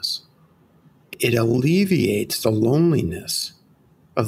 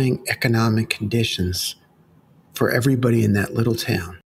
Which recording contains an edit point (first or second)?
first